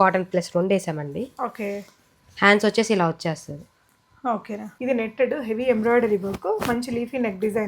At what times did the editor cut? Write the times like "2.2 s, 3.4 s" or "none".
4.7 s